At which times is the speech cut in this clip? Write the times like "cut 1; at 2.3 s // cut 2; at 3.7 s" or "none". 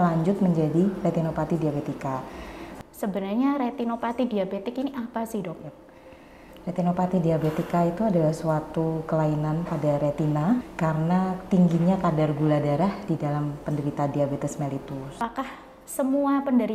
cut 1; at 2.6 s // cut 2; at 10.7 s // cut 3; at 15.1 s